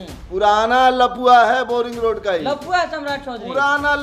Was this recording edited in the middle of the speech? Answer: no; 0 cuts

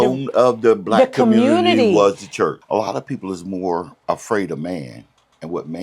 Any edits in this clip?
yes; 2 cuts; at 2.6 s, 3.9 s

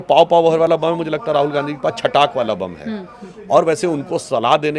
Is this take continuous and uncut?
yes; 0 cuts

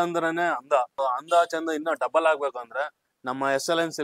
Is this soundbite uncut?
no; 1 cut; at 0.9 s

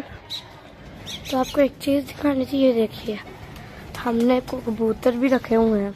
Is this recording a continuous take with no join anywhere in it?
yes; 0 cuts

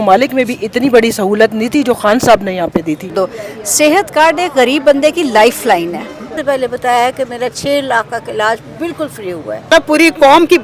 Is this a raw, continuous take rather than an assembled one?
no; 3 cuts; at 3.1 s, 6.4 s, 9.7 s

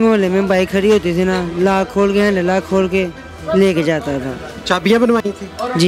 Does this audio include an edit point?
no; 0 cuts

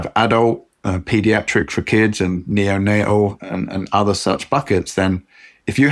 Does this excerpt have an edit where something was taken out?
no; 0 cuts

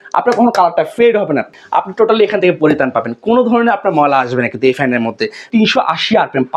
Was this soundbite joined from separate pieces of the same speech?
yes; 2 cuts; at 1.5 s, 5.4 s

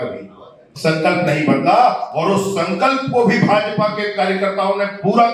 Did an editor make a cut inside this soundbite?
no; 0 cuts

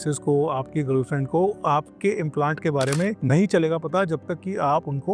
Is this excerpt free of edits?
no; 1 cut; at 3.2 s

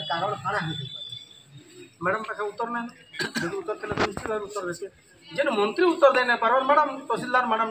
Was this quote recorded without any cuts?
yes; 0 cuts

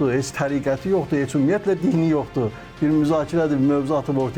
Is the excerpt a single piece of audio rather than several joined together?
yes; 0 cuts

